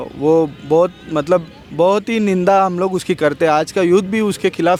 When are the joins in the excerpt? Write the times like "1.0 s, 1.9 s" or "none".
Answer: none